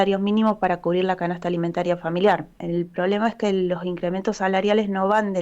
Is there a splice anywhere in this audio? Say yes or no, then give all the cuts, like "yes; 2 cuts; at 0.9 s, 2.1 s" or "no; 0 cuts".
yes; 1 cut; at 2.6 s